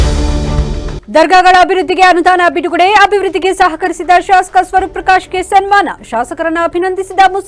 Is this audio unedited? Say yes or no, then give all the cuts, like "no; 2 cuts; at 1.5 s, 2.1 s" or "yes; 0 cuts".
no; 1 cut; at 0.9 s